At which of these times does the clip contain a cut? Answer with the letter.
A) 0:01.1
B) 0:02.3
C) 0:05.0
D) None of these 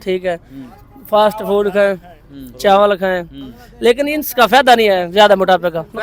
D